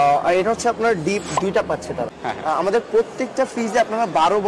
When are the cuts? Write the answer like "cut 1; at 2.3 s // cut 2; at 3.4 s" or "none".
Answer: cut 1; at 2.1 s